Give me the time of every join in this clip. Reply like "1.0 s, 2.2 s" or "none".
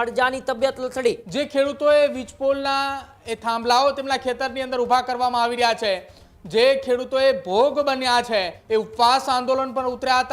1.2 s, 8.6 s